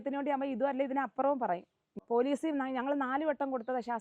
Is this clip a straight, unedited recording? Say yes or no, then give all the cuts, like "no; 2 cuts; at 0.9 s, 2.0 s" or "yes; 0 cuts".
no; 1 cut; at 1.9 s